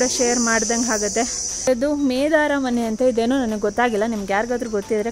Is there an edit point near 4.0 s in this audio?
no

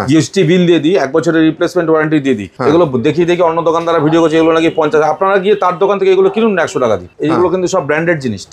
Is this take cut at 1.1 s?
no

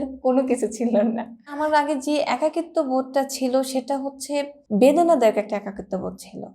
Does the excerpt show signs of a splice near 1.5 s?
yes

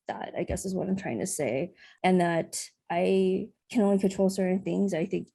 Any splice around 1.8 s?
yes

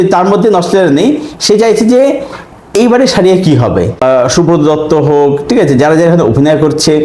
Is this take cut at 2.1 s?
no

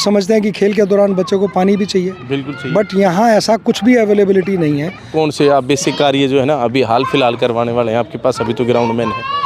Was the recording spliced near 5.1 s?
yes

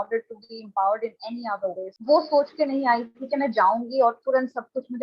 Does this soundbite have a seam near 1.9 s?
yes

